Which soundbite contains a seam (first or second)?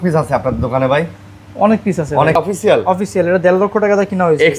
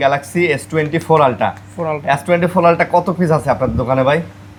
first